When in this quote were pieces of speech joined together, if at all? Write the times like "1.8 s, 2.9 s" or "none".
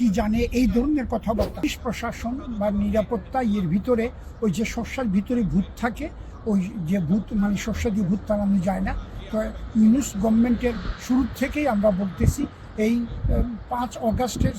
1.6 s